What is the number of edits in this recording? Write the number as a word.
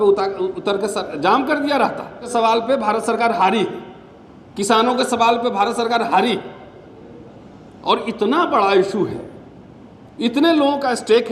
one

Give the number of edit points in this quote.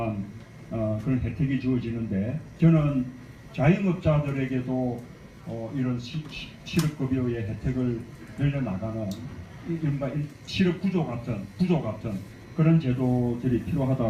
one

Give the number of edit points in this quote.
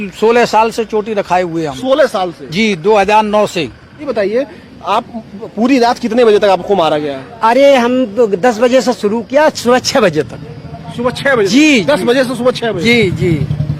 one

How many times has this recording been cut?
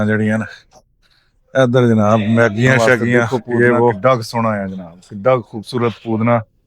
one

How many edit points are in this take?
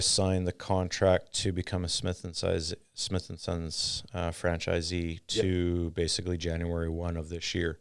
zero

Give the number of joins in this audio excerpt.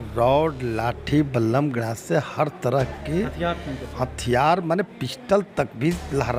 zero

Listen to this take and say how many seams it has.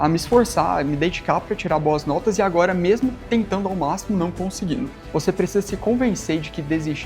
one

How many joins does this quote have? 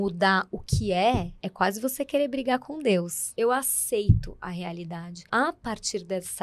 three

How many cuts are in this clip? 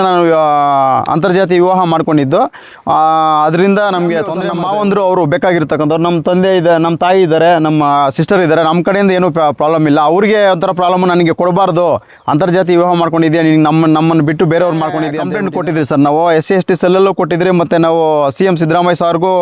two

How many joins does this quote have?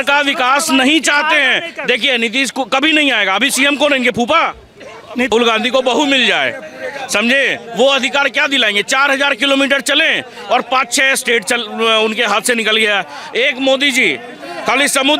one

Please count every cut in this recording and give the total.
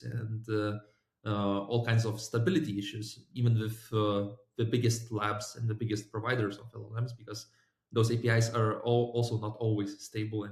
zero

